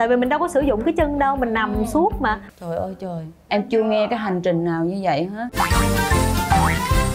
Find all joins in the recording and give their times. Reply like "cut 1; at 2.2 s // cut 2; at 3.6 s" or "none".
cut 1; at 2.4 s // cut 2; at 5.4 s

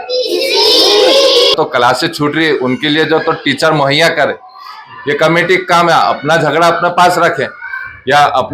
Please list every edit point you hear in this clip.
cut 1; at 1.5 s

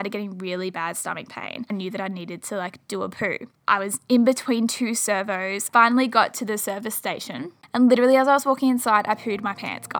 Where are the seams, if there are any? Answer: cut 1; at 1.7 s // cut 2; at 3.5 s // cut 3; at 5.7 s // cut 4; at 7.6 s

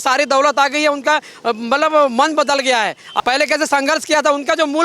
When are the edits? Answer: cut 1; at 3.1 s

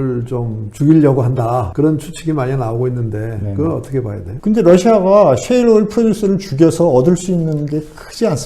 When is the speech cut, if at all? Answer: cut 1; at 1.7 s // cut 2; at 4.2 s

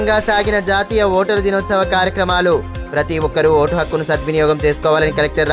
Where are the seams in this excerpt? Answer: none

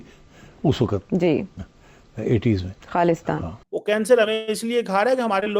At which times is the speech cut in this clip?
cut 1; at 3.7 s

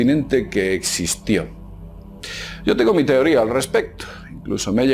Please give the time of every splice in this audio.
cut 1; at 2.4 s

